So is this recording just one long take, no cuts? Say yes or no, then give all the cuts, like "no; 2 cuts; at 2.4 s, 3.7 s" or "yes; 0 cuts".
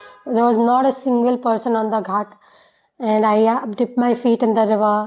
yes; 0 cuts